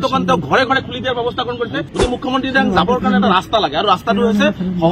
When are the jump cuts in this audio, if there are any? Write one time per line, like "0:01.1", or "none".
0:01.8

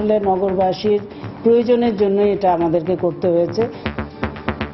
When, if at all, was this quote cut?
0:03.8

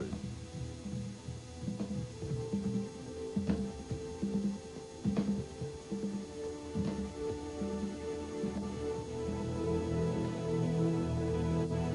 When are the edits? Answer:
0:05.1

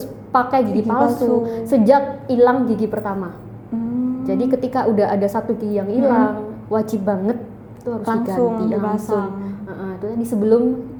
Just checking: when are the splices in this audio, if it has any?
none

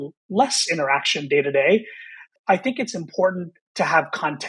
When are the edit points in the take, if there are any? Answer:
0:02.3

